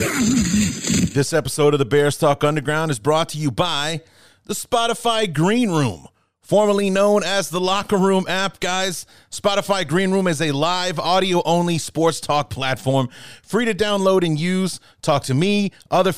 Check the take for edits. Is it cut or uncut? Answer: cut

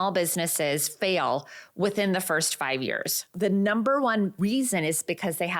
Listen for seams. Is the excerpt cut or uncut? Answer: cut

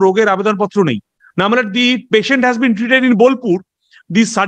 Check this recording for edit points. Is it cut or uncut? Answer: cut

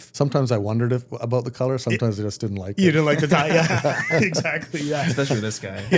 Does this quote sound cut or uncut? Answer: uncut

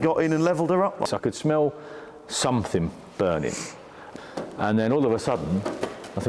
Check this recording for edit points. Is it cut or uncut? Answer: cut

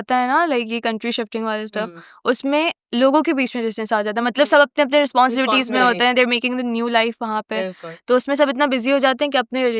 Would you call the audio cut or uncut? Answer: uncut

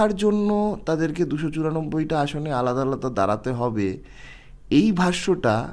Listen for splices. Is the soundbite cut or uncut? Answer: uncut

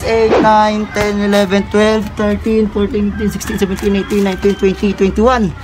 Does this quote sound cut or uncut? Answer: uncut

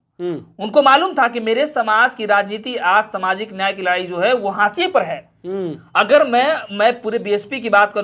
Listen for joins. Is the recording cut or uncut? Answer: uncut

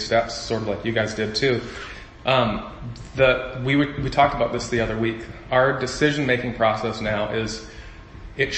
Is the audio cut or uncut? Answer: uncut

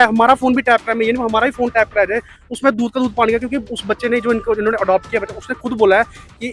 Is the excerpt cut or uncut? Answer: uncut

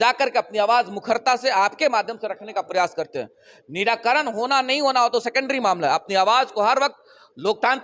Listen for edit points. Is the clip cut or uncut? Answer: uncut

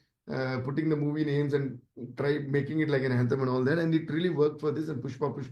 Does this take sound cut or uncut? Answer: uncut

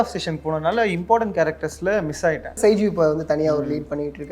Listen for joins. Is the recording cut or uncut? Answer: cut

